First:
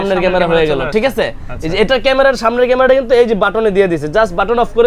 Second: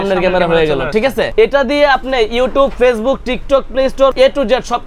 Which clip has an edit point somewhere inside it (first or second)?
second